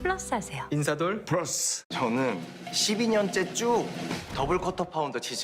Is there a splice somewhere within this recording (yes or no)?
yes